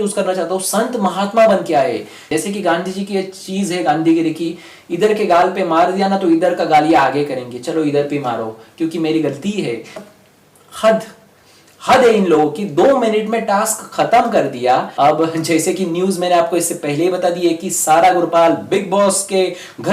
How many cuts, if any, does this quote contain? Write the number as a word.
three